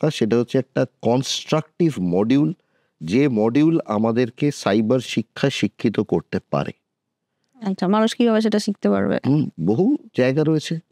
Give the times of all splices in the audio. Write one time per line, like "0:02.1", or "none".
none